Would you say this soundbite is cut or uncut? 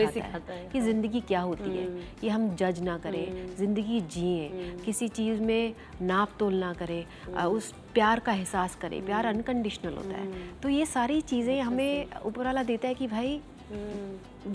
uncut